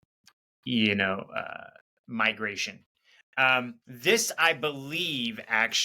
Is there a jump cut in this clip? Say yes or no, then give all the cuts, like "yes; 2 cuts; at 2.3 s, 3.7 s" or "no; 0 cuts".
yes; 1 cut; at 3.8 s